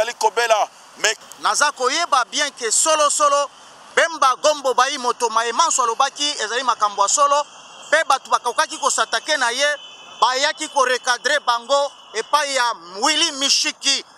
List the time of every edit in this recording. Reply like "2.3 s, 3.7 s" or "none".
1.2 s